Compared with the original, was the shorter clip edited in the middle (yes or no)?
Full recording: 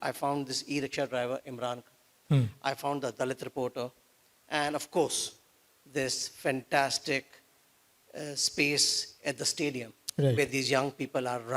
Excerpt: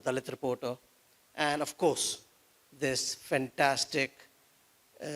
no